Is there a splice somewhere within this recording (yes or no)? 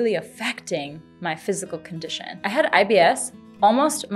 yes